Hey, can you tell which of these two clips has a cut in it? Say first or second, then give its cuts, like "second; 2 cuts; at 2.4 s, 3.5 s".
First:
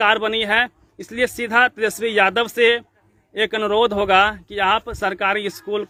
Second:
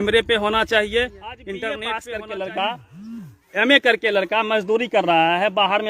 second; 1 cut; at 1.9 s